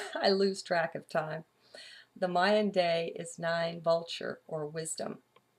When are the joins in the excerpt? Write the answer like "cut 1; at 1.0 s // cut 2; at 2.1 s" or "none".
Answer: cut 1; at 1.5 s